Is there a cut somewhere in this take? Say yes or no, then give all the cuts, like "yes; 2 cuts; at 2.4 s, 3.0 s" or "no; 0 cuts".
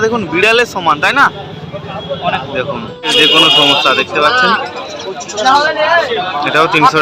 yes; 1 cut; at 3.1 s